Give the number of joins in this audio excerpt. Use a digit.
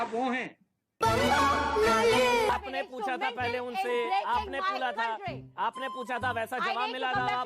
1